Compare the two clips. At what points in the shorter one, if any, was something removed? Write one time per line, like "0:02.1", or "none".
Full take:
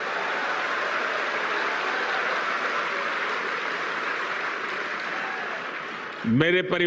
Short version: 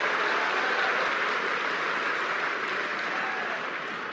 0:01.1